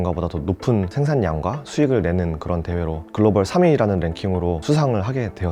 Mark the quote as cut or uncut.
uncut